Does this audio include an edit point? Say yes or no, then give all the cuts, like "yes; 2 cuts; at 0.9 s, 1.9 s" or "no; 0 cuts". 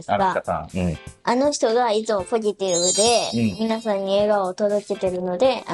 no; 0 cuts